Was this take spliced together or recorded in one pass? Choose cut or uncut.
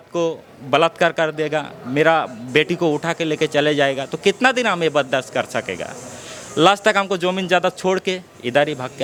uncut